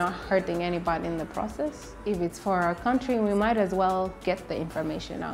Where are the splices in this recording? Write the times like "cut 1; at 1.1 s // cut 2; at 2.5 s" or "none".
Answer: cut 1; at 1.9 s